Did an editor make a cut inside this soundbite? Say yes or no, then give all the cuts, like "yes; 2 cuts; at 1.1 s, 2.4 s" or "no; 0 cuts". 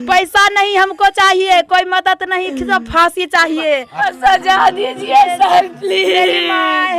yes; 1 cut; at 4.1 s